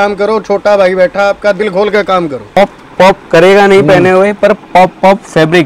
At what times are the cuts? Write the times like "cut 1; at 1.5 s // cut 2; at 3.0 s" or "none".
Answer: cut 1; at 2.6 s